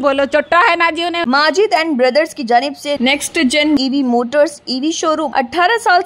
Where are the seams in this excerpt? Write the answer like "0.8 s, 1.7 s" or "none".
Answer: 1.2 s, 5.3 s

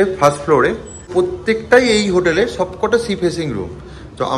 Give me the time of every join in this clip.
1.1 s

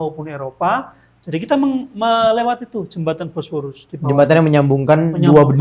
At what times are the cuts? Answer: none

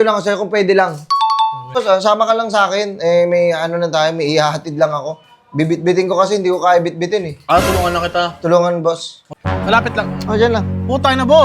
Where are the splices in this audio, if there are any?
1.8 s, 9.3 s

